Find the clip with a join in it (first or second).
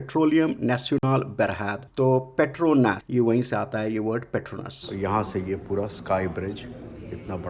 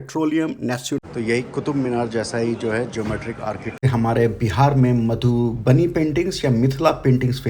second